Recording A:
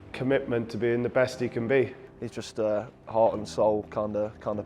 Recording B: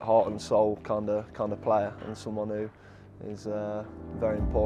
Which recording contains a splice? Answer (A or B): A